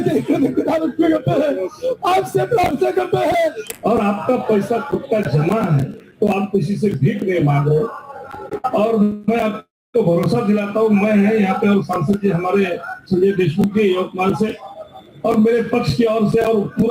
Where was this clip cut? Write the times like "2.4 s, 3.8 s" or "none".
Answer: 3.8 s